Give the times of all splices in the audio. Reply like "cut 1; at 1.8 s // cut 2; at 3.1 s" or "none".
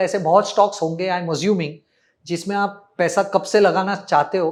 none